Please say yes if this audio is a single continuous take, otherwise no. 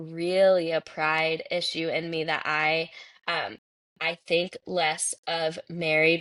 yes